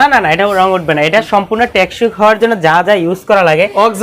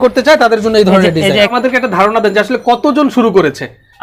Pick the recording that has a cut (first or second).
second